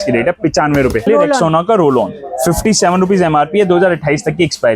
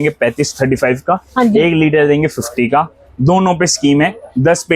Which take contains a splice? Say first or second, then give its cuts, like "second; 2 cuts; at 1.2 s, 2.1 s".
first; 1 cut; at 1.0 s